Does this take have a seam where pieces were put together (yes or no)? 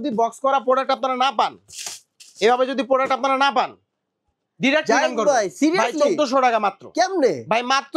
no